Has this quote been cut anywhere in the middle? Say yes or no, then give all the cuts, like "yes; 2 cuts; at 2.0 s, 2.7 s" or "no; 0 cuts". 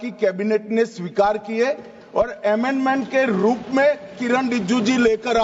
no; 0 cuts